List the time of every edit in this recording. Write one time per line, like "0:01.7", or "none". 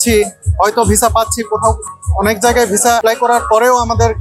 0:03.0